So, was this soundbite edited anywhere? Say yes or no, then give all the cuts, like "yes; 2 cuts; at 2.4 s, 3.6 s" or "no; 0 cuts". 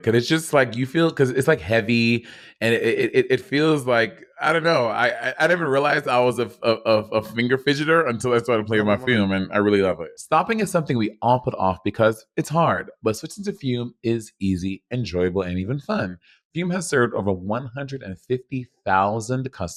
no; 0 cuts